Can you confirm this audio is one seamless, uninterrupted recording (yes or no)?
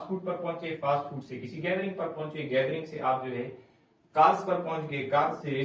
yes